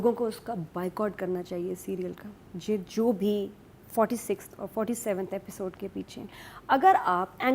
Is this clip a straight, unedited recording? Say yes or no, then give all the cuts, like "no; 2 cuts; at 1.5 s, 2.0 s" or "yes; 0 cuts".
yes; 0 cuts